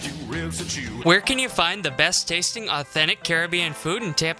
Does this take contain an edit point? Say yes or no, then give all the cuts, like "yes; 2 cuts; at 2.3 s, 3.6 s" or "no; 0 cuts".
yes; 1 cut; at 1.0 s